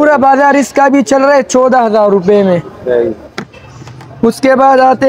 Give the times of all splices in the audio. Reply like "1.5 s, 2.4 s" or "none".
none